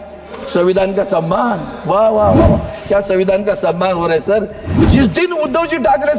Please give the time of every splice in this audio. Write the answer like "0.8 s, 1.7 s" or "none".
4.7 s